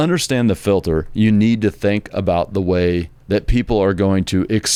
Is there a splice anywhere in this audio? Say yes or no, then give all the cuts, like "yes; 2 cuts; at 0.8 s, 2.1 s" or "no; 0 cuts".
no; 0 cuts